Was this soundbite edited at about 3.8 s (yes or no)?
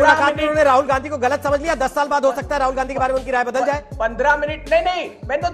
no